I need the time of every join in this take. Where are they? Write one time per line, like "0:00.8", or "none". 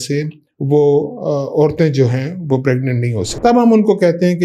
0:03.3